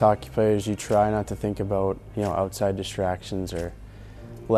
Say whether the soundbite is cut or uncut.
uncut